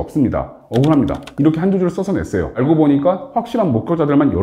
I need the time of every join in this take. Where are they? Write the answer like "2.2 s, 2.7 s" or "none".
2.6 s